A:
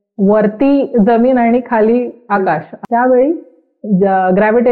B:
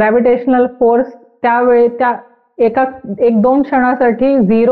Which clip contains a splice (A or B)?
A